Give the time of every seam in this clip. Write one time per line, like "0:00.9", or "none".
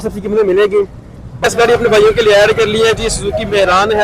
0:01.3